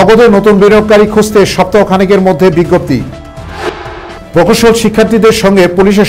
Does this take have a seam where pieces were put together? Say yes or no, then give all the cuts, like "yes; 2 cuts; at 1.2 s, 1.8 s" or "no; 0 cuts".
no; 0 cuts